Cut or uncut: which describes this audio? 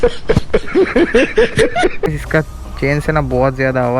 cut